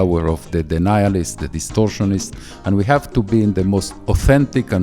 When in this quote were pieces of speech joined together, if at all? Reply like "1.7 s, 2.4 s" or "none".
3.9 s